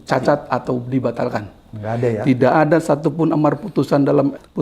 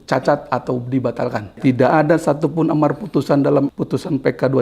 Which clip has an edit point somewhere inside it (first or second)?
second